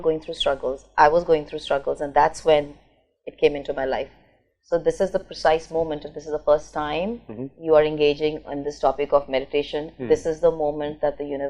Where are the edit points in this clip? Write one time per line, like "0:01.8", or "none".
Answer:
none